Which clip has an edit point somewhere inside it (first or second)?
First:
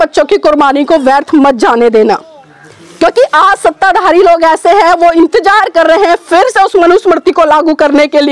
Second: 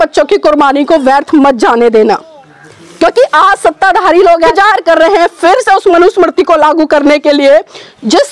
second